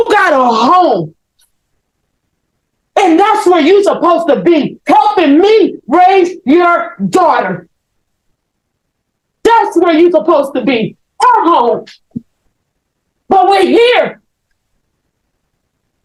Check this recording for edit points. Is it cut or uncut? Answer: uncut